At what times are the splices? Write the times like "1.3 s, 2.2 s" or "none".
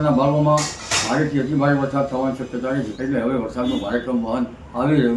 2.9 s